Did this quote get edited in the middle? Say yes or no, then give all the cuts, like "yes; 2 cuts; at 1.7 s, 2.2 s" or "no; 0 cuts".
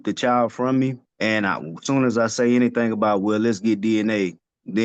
yes; 1 cut; at 1.1 s